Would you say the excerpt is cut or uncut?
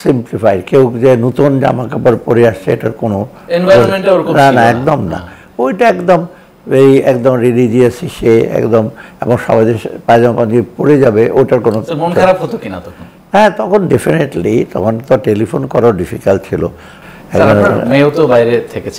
uncut